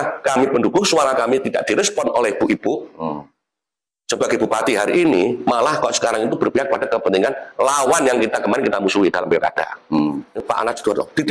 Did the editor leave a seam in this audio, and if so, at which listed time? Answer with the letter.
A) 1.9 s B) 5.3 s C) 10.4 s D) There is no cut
C